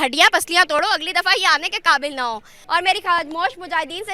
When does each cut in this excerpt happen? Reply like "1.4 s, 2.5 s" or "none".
2.5 s